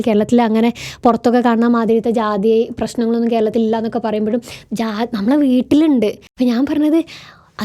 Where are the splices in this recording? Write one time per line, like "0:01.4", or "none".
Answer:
0:06.2